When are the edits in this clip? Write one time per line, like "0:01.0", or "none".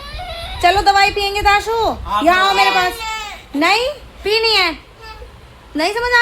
0:04.1